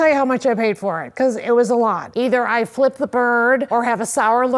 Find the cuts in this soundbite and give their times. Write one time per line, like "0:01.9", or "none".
0:02.0
0:03.7